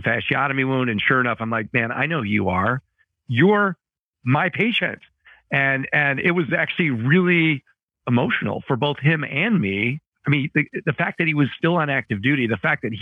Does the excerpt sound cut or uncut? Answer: uncut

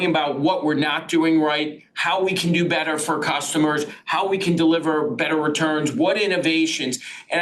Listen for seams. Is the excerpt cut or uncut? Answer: uncut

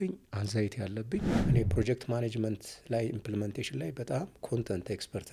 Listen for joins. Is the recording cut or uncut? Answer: cut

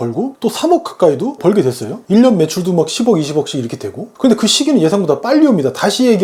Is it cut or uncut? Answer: uncut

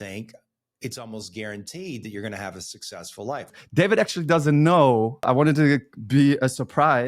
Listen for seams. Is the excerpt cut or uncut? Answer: cut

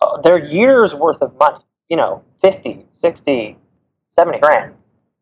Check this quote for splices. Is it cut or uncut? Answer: cut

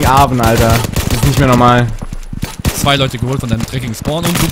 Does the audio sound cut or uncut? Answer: uncut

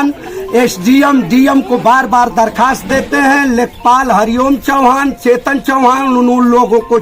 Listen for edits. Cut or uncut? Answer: uncut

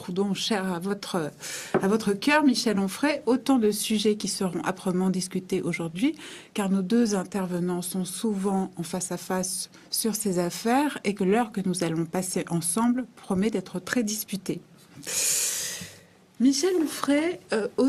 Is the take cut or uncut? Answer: uncut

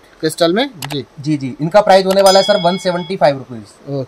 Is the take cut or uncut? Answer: uncut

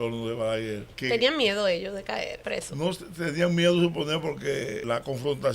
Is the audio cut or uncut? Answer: cut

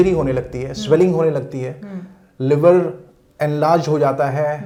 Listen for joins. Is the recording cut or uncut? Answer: uncut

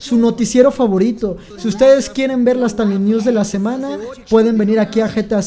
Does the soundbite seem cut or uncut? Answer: cut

